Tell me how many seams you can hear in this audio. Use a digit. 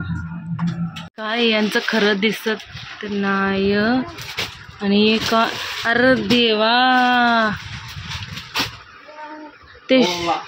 1